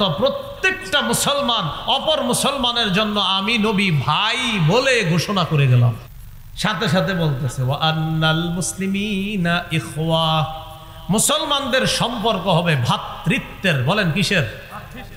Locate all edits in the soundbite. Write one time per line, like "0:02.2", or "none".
0:06.1

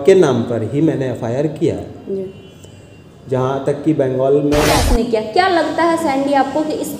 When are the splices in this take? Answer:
0:04.8

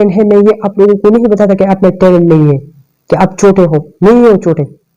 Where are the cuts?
none

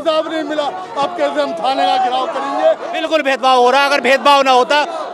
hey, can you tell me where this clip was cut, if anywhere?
0:02.9

